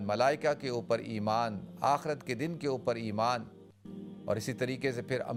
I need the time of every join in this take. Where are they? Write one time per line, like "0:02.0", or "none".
none